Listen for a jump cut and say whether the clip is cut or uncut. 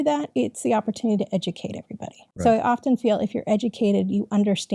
cut